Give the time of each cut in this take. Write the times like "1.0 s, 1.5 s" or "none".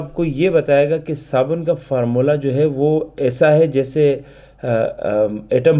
none